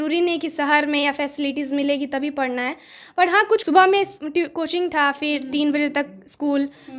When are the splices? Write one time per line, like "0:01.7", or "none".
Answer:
0:03.6